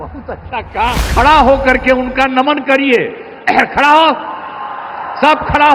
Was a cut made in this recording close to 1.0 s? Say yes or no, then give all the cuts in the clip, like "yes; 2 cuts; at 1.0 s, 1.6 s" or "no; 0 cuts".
yes; 1 cut; at 1.0 s